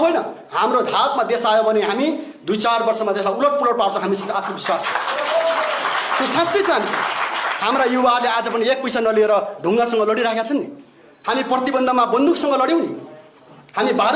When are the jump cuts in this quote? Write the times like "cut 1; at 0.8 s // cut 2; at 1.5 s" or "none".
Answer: none